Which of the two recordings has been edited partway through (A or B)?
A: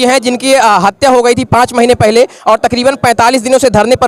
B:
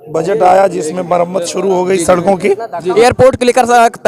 B